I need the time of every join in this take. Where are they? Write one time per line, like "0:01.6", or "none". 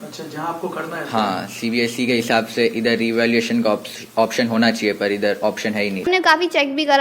0:06.1